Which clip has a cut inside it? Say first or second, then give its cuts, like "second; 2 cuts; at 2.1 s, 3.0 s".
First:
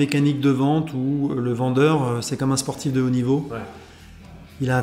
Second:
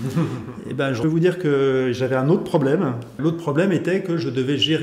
second; 2 cuts; at 1.0 s, 3.1 s